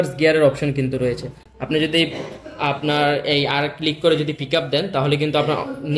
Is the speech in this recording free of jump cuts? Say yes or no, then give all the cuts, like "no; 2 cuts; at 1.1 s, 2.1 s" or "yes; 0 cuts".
yes; 0 cuts